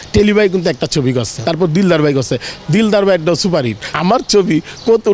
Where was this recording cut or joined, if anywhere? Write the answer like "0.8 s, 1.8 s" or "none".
1.3 s, 3.9 s